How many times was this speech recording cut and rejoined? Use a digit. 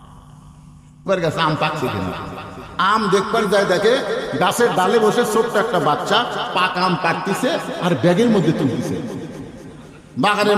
1